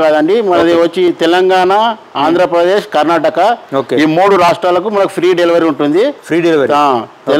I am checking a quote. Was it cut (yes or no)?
no